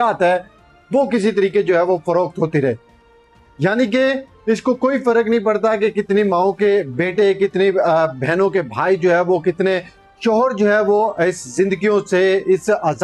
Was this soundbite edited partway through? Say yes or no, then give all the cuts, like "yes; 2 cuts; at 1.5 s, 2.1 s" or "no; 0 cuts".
no; 0 cuts